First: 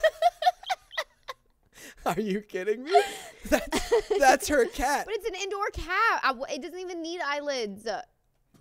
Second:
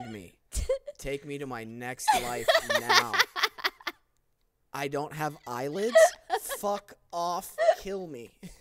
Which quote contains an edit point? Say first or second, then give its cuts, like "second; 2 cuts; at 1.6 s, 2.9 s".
first; 1 cut; at 3.3 s